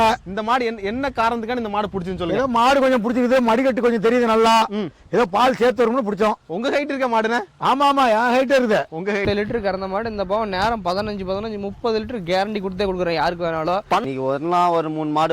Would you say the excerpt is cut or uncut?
cut